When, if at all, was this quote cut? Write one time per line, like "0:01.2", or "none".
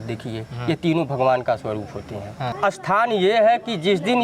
0:02.5